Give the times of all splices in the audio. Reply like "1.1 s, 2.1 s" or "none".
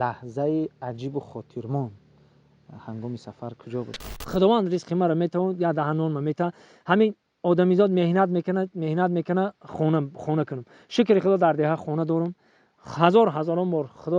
4.1 s